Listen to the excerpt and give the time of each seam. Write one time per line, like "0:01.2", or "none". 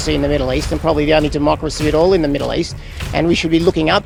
none

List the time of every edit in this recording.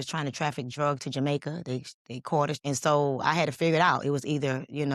0:02.6

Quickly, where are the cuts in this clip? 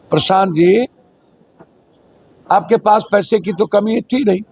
none

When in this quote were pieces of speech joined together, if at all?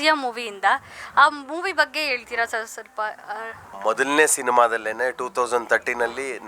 0:03.7

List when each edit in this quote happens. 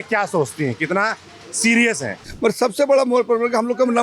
0:02.2

